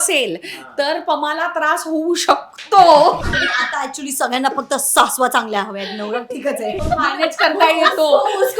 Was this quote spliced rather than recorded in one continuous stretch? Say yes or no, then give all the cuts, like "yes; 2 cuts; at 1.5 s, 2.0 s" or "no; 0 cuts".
yes; 2 cuts; at 3.3 s, 6.8 s